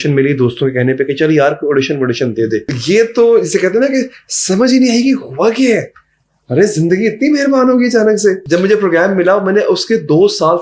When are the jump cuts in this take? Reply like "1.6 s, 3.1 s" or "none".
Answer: 2.7 s, 8.4 s